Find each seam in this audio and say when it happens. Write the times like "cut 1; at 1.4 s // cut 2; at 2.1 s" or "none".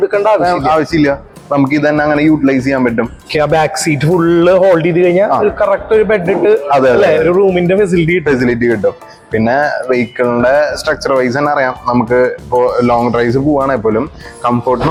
none